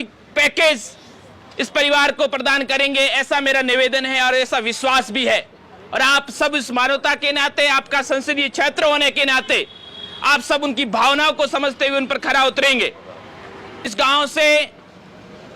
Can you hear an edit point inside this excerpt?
yes; 1 cut; at 13.9 s

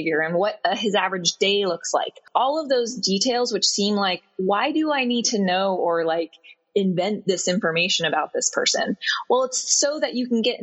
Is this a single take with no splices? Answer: no; 1 cut; at 2.2 s

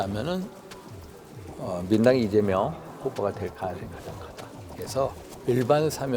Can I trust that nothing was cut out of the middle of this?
no; 1 cut; at 5.3 s

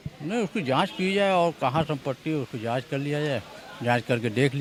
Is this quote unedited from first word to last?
yes; 0 cuts

